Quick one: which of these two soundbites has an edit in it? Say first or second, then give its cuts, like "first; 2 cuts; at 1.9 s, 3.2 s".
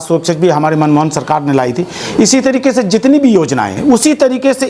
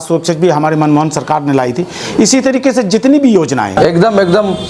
second; 1 cut; at 3.8 s